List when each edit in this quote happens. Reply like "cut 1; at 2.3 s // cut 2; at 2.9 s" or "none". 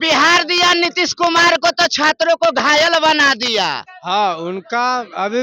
cut 1; at 3.9 s